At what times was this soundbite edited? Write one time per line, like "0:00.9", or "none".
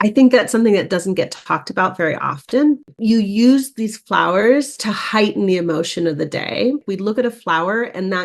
0:02.9
0:06.8